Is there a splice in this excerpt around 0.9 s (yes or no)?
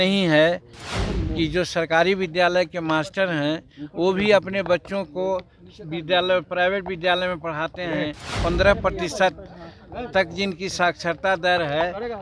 yes